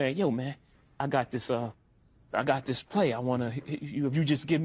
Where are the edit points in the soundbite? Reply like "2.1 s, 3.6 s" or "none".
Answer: none